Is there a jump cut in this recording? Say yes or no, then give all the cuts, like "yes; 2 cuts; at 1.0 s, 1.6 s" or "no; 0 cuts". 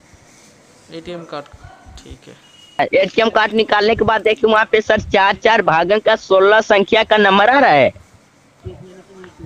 yes; 1 cut; at 2.8 s